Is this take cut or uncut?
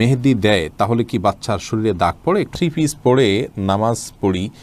cut